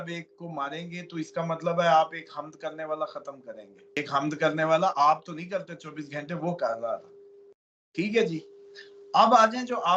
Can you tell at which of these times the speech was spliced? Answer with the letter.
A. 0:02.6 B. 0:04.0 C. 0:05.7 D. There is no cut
B